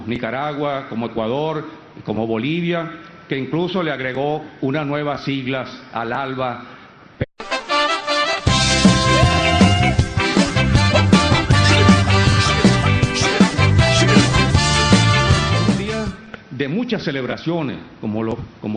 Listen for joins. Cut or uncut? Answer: uncut